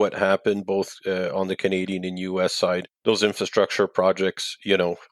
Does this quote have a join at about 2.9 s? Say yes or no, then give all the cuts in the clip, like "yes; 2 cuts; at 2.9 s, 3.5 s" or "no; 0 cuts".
yes; 1 cut; at 2.9 s